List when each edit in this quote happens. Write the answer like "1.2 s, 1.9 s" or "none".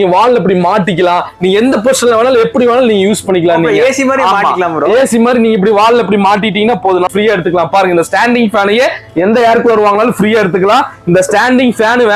7.1 s